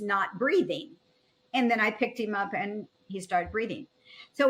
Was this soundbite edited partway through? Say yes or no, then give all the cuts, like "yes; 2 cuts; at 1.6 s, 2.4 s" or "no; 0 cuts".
yes; 1 cut; at 3.1 s